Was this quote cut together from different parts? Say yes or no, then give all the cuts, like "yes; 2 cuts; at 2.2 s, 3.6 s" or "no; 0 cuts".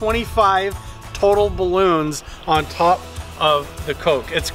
no; 0 cuts